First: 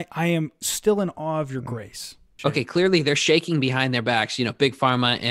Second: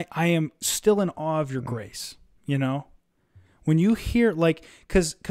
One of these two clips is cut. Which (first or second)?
first